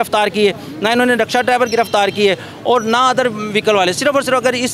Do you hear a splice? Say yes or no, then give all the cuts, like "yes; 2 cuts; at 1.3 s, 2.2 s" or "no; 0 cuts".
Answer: no; 0 cuts